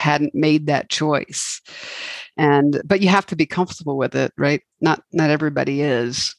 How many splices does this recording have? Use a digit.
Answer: 0